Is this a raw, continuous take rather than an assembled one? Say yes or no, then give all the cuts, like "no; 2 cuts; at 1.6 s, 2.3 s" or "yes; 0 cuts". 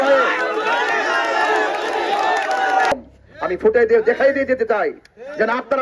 no; 1 cut; at 2.9 s